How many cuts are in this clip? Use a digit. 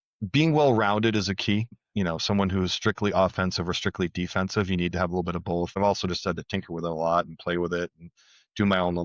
2